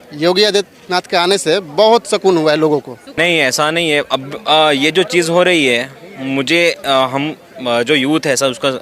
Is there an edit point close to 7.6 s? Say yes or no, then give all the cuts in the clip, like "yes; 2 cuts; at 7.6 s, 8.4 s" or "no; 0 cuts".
no; 1 cut; at 3.0 s